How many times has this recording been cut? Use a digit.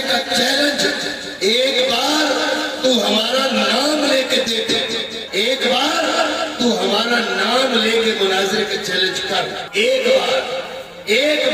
2